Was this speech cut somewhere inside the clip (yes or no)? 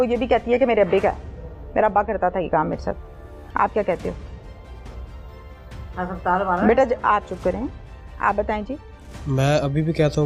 no